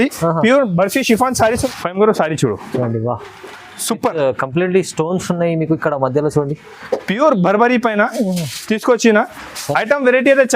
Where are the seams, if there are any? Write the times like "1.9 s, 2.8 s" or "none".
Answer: 1.6 s